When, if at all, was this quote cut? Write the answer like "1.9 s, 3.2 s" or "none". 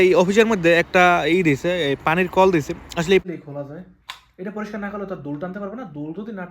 3.2 s